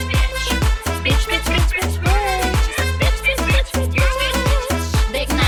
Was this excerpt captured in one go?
yes; 0 cuts

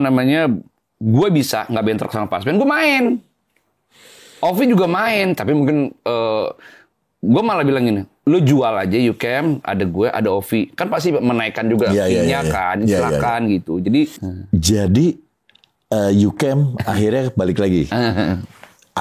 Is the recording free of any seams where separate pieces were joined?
yes; 0 cuts

